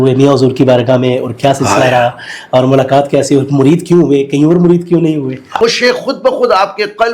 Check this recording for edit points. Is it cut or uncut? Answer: cut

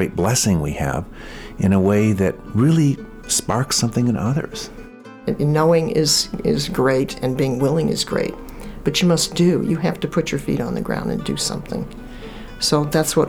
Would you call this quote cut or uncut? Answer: cut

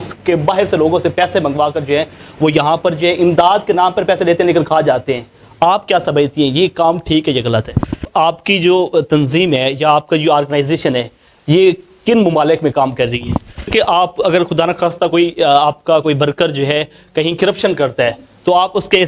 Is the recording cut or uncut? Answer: cut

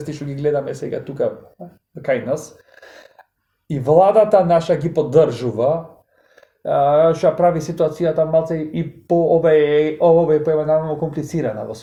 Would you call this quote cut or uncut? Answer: uncut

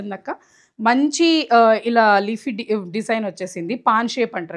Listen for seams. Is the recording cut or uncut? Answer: uncut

